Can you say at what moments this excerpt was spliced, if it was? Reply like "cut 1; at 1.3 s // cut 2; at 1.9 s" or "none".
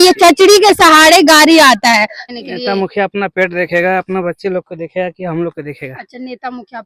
cut 1; at 2.2 s